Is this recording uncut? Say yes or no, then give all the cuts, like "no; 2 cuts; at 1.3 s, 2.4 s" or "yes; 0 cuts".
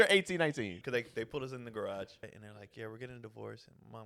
no; 2 cuts; at 0.8 s, 2.7 s